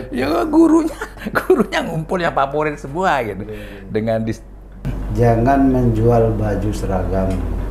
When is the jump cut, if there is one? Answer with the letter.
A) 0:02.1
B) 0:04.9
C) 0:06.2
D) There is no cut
B